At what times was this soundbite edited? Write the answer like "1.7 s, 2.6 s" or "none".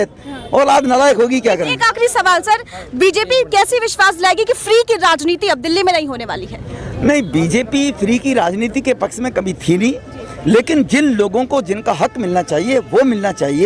none